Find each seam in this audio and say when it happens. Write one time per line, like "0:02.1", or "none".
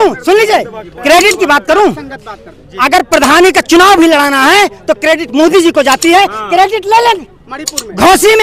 none